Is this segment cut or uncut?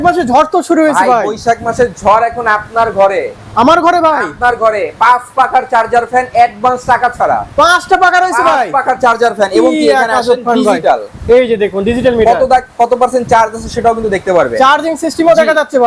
uncut